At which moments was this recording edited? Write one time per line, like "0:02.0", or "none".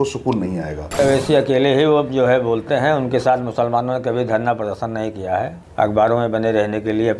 0:01.0
0:05.6

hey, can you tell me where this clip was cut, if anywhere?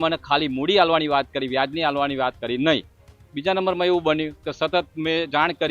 none

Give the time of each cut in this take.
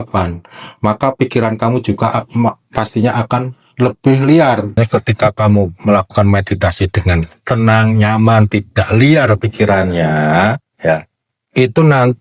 0:04.7

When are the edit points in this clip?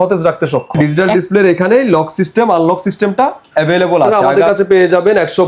0:00.8
0:04.2

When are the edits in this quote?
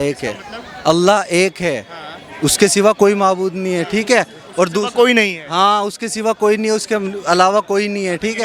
none

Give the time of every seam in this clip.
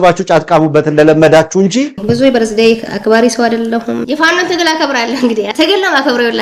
0:01.9
0:02.9
0:04.0
0:05.5

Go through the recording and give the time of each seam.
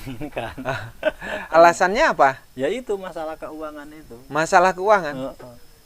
0:01.5

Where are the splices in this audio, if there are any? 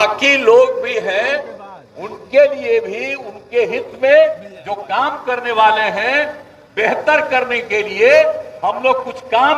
none

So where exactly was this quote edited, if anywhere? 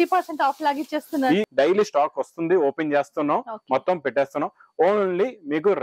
0:01.5

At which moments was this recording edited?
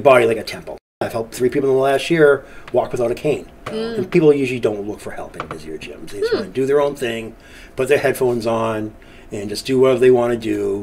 0:01.0
0:03.6

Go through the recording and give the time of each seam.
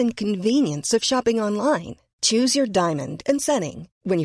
none

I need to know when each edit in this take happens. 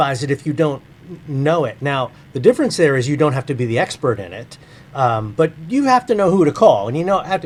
none

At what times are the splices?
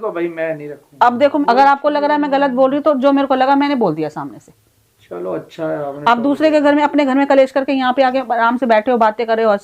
0:01.4

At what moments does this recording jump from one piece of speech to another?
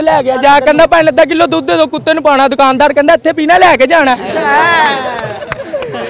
none

